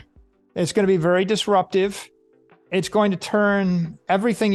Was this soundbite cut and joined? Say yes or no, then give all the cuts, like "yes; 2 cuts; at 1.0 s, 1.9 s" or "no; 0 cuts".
no; 0 cuts